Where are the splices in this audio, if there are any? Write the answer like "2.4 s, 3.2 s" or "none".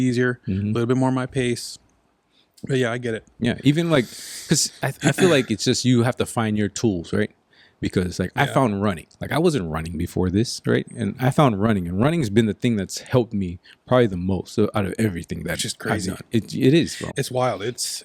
none